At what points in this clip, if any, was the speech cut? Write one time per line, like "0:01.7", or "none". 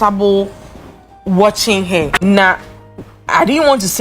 0:02.1